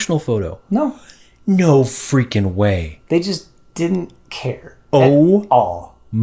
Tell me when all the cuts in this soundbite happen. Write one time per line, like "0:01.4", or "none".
none